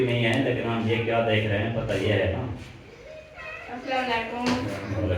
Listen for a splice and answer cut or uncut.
uncut